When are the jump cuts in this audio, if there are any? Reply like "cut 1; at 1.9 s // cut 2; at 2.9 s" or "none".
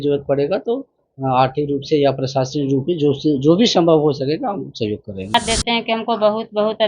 cut 1; at 5.3 s